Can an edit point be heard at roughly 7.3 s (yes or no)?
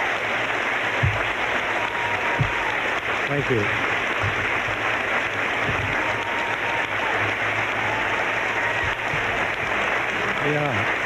no